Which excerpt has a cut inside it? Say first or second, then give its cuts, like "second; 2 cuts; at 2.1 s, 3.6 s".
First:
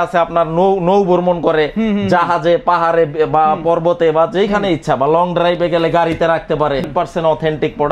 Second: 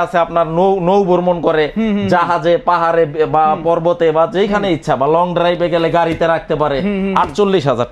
first; 1 cut; at 6.9 s